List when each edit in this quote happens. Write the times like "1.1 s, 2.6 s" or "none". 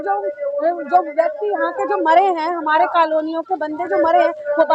none